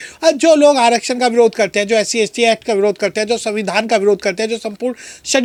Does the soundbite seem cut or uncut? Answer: uncut